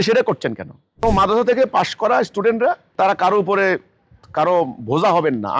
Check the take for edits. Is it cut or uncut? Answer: cut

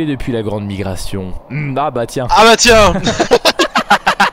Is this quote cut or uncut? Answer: uncut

